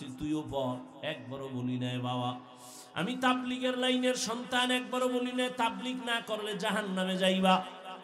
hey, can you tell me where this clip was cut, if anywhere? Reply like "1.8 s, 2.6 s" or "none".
none